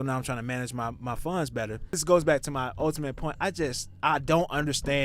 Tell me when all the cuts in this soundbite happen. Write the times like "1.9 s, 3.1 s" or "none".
2.0 s